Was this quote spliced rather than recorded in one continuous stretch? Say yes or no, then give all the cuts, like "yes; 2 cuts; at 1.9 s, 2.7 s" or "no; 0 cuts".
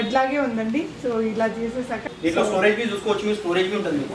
yes; 1 cut; at 2.0 s